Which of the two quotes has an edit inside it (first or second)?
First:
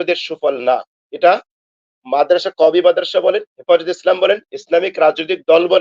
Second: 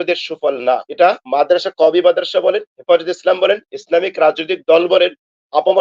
second